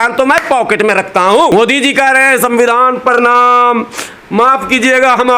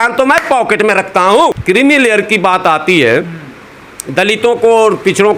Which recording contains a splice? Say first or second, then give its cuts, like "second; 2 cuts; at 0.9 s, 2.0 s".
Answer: second; 1 cut; at 1.5 s